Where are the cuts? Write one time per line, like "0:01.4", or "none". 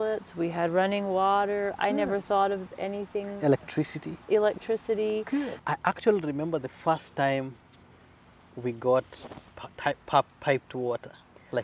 0:05.5